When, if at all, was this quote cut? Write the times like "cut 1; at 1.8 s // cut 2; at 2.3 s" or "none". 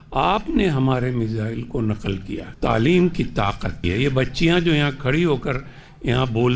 cut 1; at 2.5 s // cut 2; at 3.9 s